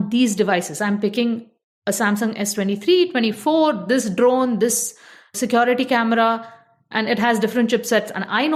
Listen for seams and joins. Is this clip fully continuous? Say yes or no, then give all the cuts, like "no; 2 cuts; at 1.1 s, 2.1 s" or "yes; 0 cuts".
yes; 0 cuts